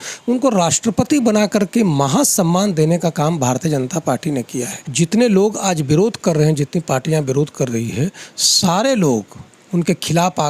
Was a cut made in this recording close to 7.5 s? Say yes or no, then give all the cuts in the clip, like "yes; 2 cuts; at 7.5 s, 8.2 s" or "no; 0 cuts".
no; 1 cut; at 4.8 s